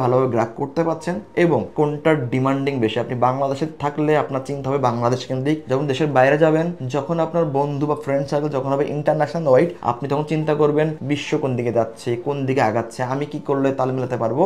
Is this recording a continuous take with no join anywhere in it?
yes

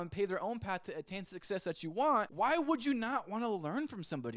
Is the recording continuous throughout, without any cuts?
no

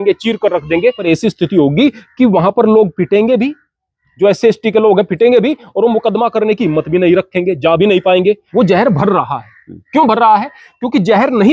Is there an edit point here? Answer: yes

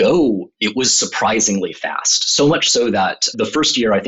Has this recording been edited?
no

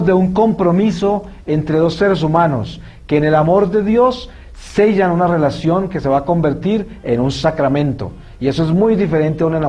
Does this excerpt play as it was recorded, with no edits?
yes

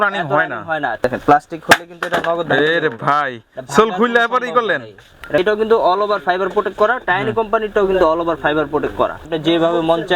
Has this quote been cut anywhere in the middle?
yes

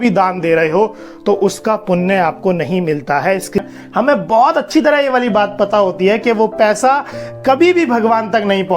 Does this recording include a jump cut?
yes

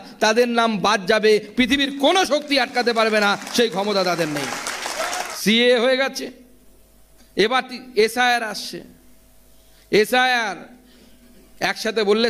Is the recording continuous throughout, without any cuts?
yes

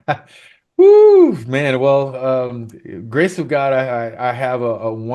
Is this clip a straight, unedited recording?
yes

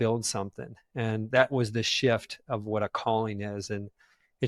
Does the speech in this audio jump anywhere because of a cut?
no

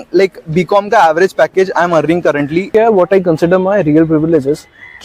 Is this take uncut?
no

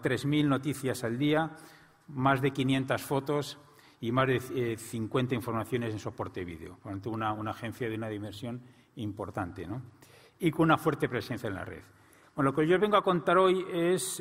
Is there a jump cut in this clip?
no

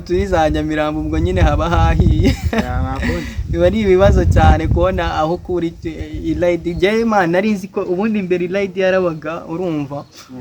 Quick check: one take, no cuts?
yes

